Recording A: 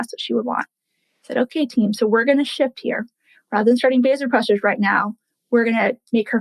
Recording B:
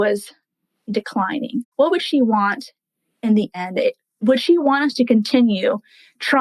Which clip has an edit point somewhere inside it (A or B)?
B